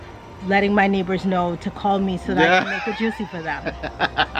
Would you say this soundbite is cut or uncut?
uncut